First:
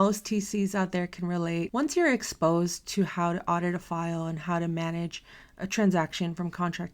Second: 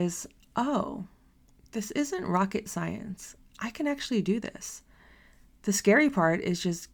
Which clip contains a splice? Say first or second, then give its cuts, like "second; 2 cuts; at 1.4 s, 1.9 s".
first; 1 cut; at 1.7 s